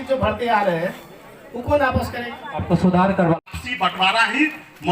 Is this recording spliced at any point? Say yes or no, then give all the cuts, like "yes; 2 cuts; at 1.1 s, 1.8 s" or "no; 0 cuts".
yes; 1 cut; at 3.4 s